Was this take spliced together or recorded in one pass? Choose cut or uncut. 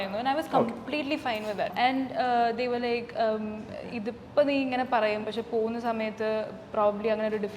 cut